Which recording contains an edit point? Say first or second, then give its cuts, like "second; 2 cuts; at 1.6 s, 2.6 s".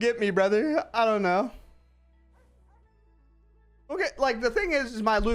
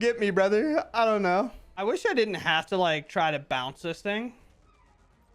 second; 1 cut; at 1.6 s